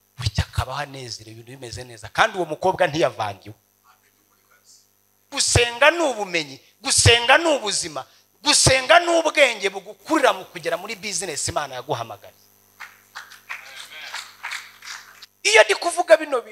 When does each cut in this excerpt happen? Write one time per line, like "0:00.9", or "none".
0:05.3
0:15.2